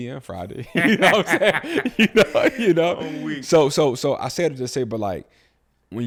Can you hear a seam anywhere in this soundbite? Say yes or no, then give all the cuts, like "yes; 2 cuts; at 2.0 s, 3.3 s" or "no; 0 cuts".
no; 0 cuts